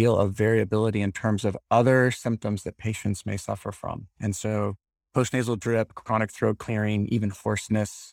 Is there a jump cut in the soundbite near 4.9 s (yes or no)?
yes